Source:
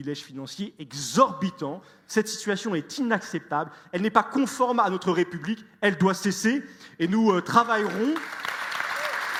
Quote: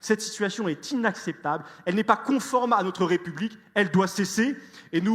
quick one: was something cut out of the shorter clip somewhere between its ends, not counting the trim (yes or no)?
no